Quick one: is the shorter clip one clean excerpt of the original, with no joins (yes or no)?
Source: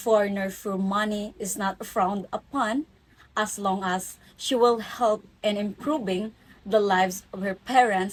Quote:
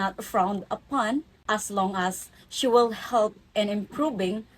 no